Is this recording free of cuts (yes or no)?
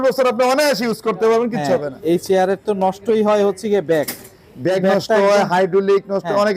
yes